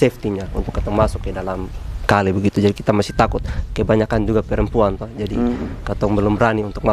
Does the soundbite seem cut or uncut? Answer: uncut